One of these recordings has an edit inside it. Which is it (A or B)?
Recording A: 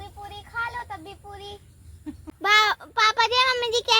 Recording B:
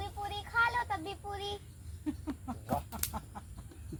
A